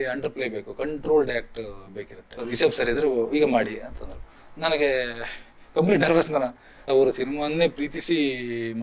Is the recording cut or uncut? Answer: cut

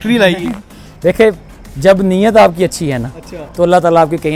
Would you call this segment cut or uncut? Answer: uncut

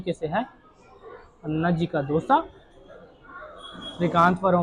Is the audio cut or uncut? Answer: uncut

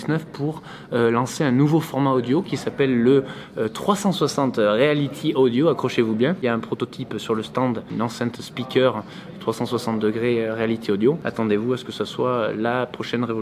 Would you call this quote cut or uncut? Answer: cut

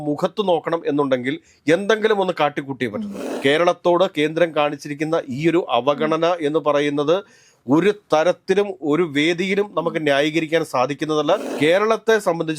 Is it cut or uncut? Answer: cut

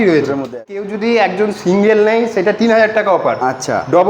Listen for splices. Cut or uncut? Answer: cut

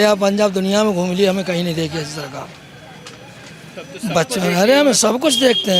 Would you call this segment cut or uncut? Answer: cut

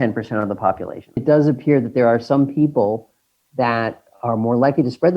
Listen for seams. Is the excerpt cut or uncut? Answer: cut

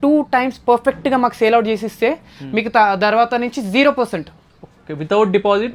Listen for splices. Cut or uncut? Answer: uncut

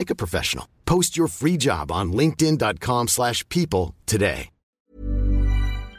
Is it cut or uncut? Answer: cut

